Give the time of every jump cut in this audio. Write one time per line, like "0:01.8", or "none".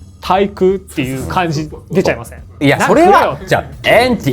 0:02.6